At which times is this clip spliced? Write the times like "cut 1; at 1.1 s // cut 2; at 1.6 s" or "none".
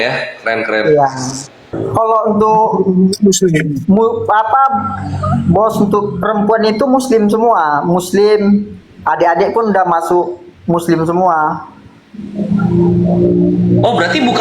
cut 1; at 1.6 s